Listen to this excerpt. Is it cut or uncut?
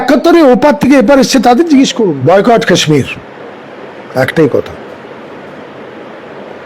cut